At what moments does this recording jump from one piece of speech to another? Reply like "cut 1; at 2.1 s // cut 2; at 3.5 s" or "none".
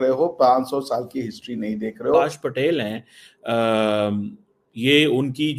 cut 1; at 2.2 s